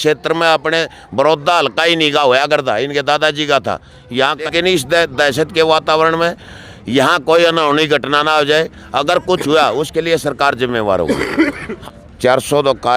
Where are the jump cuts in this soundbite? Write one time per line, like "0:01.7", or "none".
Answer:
0:04.5
0:11.7

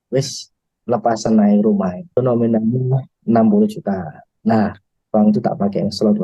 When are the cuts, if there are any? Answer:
0:02.2

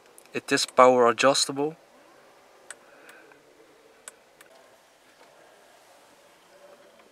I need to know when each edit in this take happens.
0:04.5

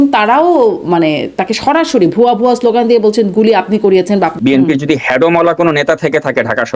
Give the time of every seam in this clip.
0:04.3

